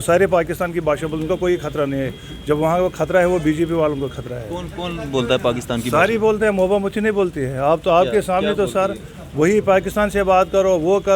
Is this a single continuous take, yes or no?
yes